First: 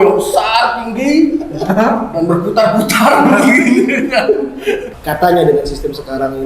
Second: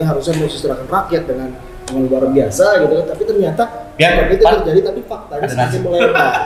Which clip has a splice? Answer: first; 1 cut; at 4.9 s

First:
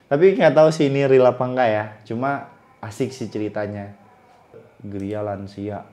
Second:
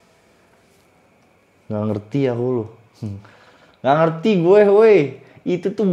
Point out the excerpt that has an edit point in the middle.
first; 1 cut; at 4.7 s

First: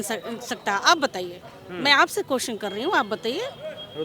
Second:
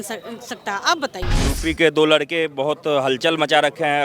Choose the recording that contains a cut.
second; 1 cut; at 1.5 s

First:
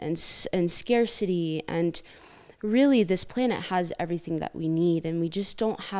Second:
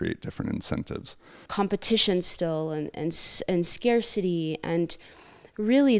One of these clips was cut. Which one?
second; 1 cut; at 1.4 s

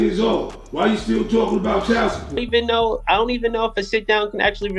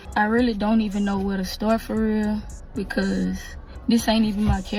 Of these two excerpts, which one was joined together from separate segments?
first; 1 cut; at 2.3 s

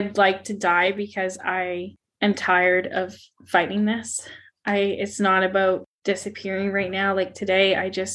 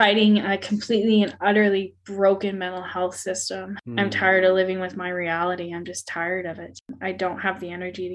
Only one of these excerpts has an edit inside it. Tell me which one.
second; 2 cuts; at 3.8 s, 6.9 s

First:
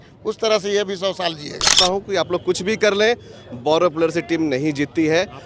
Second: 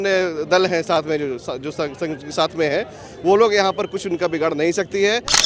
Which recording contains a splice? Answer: first; 1 cut; at 1.8 s

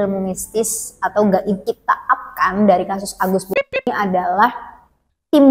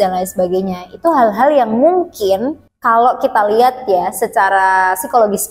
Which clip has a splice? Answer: first; 1 cut; at 1.6 s

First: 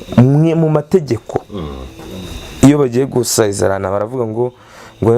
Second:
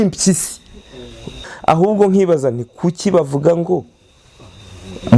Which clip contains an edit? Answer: second; 1 cut; at 1.4 s

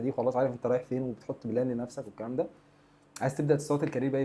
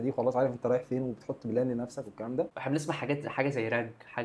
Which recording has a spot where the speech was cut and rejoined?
second; 1 cut; at 2.6 s

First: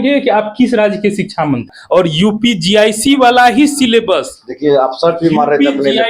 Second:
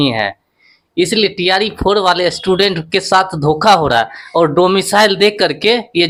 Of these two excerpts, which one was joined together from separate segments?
first; 1 cut; at 1.7 s

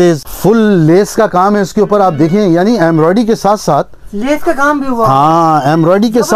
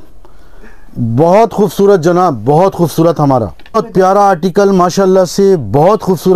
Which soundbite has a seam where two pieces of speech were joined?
second; 1 cut; at 3.8 s

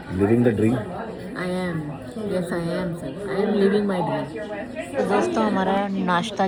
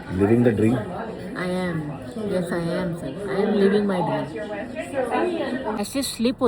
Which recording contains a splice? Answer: second; 1 cut; at 5.4 s

